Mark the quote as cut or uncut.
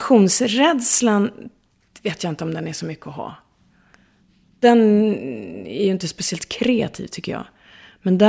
cut